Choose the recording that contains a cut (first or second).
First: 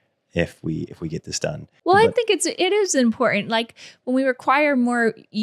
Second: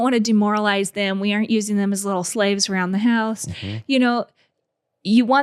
first